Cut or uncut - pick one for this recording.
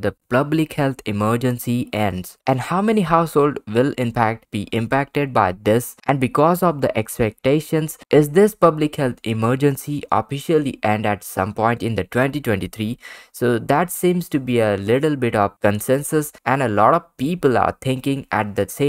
cut